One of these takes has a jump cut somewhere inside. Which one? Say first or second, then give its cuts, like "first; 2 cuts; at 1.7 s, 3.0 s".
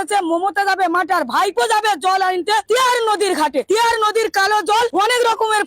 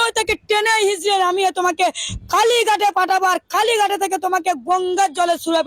first; 3 cuts; at 2.6 s, 3.7 s, 4.9 s